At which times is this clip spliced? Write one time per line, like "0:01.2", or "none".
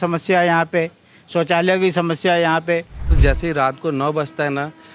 0:03.2